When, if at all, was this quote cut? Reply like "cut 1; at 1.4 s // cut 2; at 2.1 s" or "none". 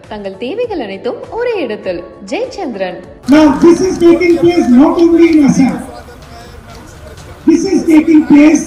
cut 1; at 3.1 s